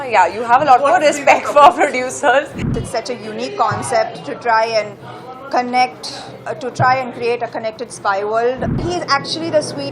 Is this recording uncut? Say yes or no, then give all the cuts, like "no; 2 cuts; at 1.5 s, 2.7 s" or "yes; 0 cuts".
no; 2 cuts; at 2.8 s, 8.8 s